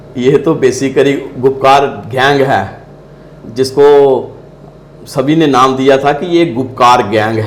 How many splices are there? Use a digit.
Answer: 0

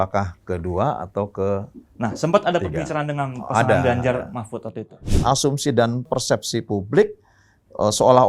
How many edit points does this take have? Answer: 1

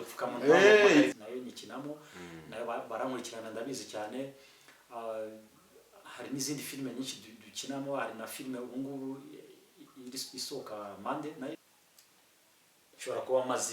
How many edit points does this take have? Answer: 2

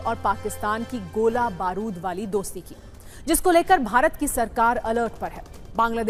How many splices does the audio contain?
0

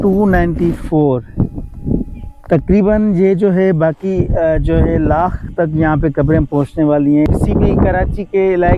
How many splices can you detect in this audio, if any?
1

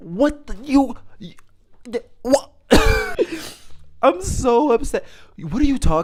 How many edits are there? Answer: 0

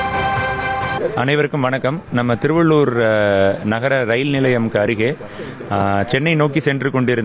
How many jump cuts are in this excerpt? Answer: 1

